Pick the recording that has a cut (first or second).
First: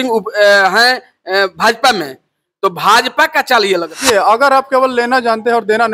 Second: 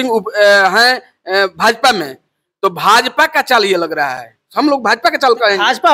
first